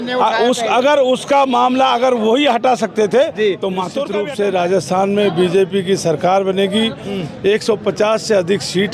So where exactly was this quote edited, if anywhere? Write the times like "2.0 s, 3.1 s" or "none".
4.0 s